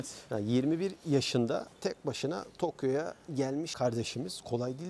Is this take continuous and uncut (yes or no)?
no